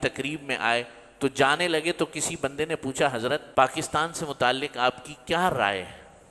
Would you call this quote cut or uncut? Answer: cut